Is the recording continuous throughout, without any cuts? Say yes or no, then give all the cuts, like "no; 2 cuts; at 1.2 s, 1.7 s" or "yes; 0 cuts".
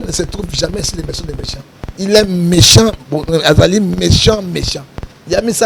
yes; 0 cuts